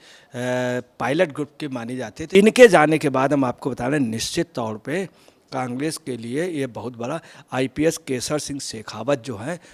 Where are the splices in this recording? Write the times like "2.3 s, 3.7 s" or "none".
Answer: 2.1 s